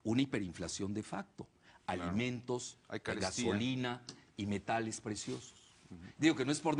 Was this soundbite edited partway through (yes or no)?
no